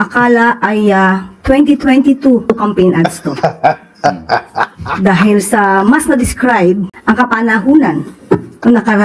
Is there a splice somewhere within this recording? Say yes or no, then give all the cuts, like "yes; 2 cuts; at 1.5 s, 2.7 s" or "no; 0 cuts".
yes; 2 cuts; at 2.5 s, 6.9 s